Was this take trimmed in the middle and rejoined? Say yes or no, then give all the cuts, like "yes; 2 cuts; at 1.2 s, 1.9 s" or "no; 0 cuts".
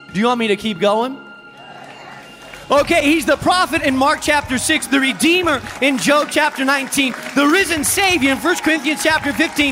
yes; 2 cuts; at 3.8 s, 6.0 s